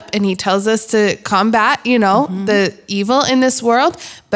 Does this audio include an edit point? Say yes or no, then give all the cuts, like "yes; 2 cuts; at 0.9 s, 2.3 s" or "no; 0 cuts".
no; 0 cuts